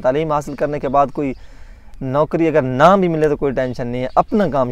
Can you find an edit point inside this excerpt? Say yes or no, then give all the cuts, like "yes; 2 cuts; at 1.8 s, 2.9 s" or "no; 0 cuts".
no; 0 cuts